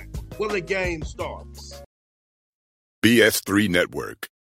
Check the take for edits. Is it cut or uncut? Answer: cut